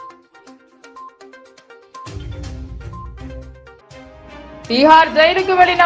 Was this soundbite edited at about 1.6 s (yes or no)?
yes